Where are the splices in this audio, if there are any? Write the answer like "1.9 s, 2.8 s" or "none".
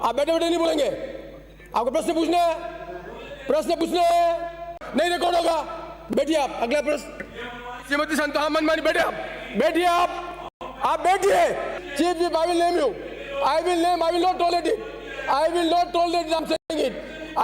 4.8 s, 11.8 s